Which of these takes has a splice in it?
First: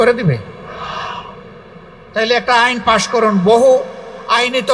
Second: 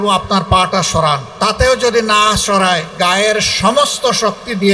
second; 2 cuts; at 1.3 s, 2.9 s

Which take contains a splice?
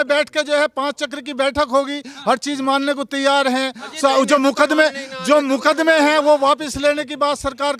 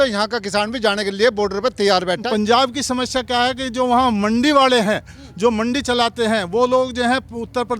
second; 1 cut; at 2.2 s

